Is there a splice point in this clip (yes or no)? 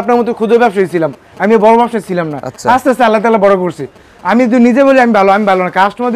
no